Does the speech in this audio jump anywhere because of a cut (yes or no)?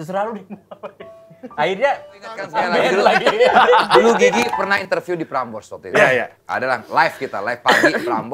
yes